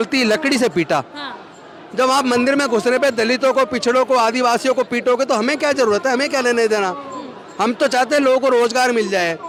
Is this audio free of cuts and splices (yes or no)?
yes